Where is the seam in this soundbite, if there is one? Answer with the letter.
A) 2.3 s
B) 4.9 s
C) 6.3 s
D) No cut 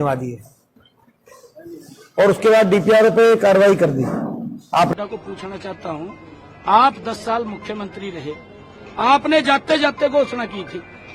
B